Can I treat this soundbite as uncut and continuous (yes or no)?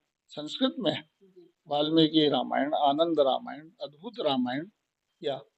yes